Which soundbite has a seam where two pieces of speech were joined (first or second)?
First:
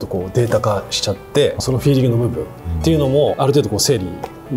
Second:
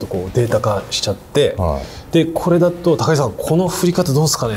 first